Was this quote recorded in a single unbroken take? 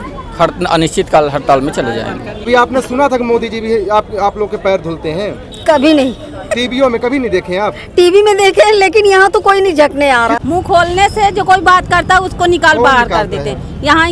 no; 2 cuts; at 2.5 s, 10.4 s

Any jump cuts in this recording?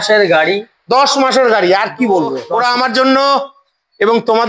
yes; 1 cut; at 2.4 s

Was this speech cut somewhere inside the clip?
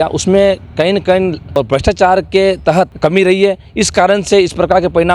yes; 2 cuts; at 1.4 s, 2.9 s

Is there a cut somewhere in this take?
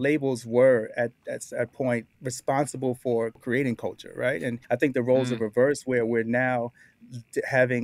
yes; 3 cuts; at 2.1 s, 3.4 s, 4.6 s

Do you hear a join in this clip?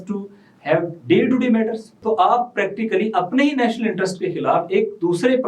yes; 1 cut; at 1.9 s

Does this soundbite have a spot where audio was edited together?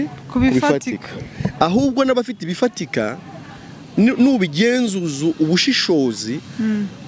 no; 0 cuts

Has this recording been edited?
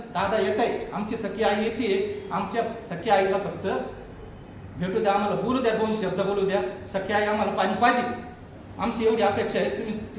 no; 0 cuts

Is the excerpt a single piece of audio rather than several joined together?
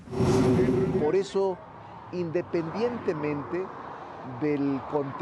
no; 1 cut; at 1.0 s

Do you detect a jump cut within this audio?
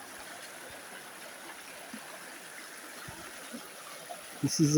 no; 0 cuts

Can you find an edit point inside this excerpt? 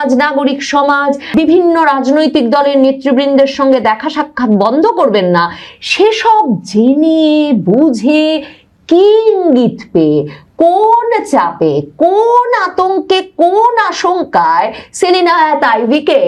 no; 0 cuts

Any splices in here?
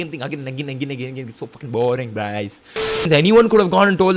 yes; 1 cut; at 3.1 s

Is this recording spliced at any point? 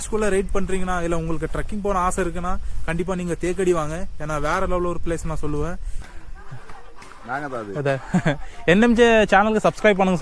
yes; 1 cut; at 6.0 s

